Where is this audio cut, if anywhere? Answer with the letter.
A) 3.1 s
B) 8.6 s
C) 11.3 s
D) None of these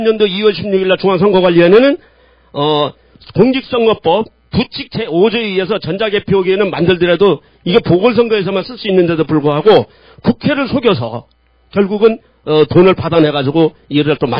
B